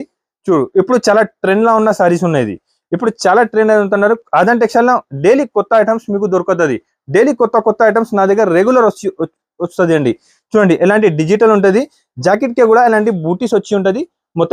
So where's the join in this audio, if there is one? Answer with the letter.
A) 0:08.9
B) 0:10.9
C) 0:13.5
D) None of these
D